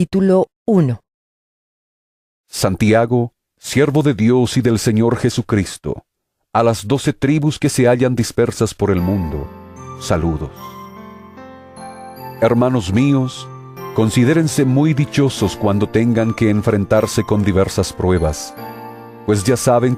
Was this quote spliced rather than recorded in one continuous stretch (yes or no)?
no